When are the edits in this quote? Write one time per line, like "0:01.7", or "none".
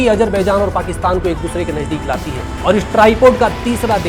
0:02.5